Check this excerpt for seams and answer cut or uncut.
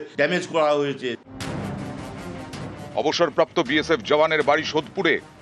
cut